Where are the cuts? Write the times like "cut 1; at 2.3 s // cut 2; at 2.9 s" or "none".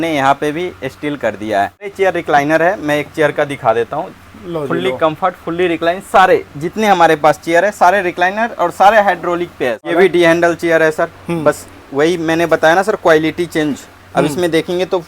cut 1; at 1.9 s // cut 2; at 9.9 s